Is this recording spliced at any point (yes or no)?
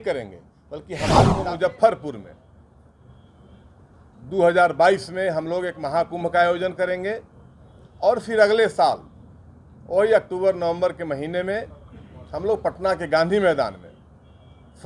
yes